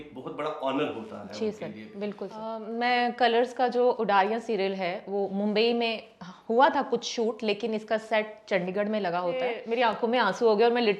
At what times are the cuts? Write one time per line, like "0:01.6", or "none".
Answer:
0:02.6
0:09.6